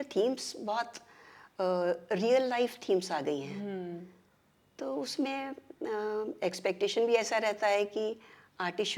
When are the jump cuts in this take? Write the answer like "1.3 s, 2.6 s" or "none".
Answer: none